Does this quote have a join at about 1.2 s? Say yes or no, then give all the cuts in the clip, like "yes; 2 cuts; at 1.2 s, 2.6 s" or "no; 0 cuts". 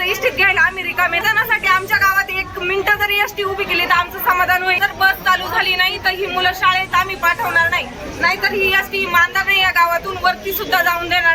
yes; 2 cuts; at 1.2 s, 4.8 s